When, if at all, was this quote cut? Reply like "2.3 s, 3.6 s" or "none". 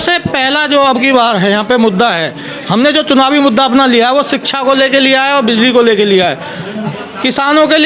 6.8 s